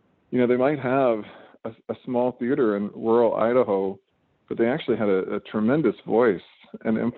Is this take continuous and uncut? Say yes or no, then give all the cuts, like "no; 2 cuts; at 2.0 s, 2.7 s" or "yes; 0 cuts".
yes; 0 cuts